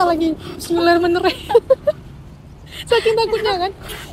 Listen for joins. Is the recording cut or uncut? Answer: uncut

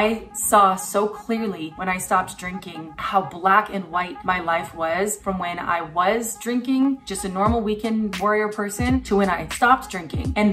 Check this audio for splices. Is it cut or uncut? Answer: uncut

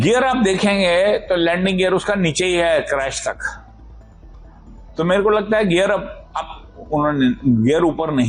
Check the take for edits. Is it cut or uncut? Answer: uncut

